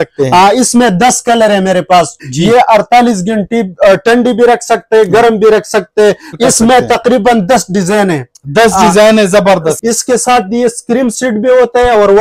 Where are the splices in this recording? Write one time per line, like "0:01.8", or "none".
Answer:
0:02.2
0:06.3
0:09.8